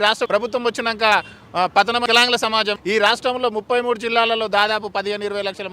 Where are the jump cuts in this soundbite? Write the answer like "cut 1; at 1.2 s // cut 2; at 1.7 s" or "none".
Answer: cut 1; at 2.3 s